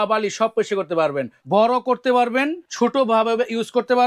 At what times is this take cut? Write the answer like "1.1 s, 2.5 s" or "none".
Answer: 1.4 s, 2.6 s